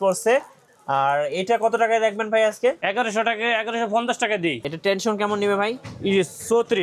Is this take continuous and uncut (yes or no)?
no